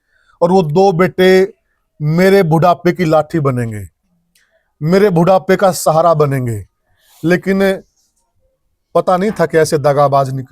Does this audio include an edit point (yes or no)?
no